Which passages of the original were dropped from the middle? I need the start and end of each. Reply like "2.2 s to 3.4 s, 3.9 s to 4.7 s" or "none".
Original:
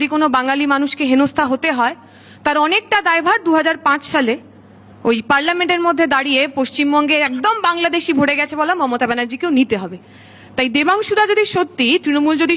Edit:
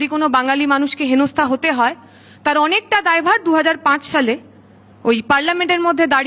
none